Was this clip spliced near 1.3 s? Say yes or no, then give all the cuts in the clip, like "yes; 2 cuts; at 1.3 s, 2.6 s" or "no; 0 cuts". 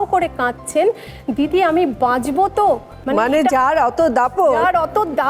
no; 1 cut; at 2.9 s